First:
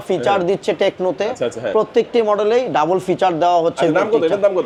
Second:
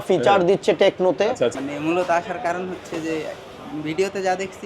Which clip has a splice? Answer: second; 1 cut; at 1.6 s

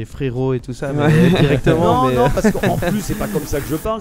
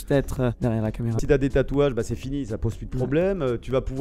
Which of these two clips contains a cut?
second; 1 cut; at 1.1 s

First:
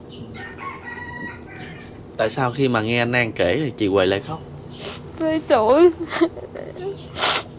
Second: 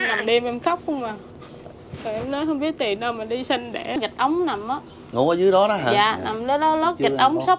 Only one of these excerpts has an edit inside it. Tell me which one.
second; 1 cut; at 3.9 s

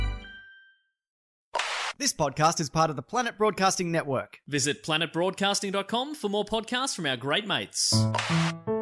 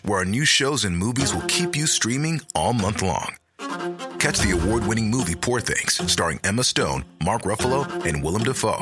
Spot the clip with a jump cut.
first; 2 cuts; at 1.7 s, 7.9 s

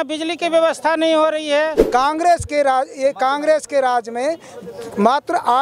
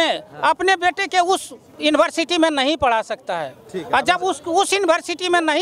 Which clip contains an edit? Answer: first; 1 cut; at 1.8 s

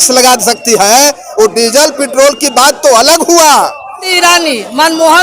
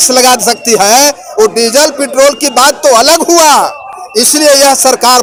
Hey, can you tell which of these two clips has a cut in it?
first; 1 cut; at 4.0 s

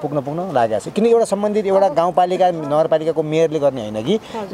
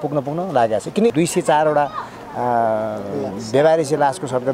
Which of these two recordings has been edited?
second; 1 cut; at 1.1 s

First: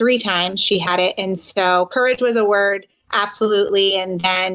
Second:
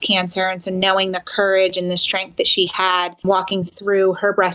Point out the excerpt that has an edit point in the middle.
second; 1 cut; at 3.2 s

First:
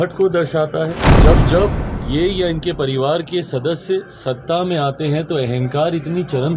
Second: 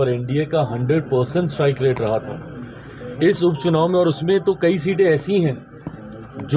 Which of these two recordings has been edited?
first; 1 cut; at 1.1 s

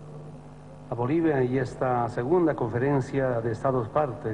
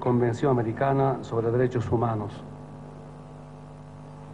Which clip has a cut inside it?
second; 1 cut; at 2.9 s

